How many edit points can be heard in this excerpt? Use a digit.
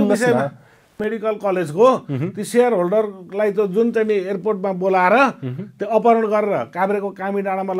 1